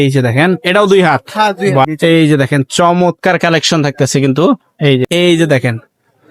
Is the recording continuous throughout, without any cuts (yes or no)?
no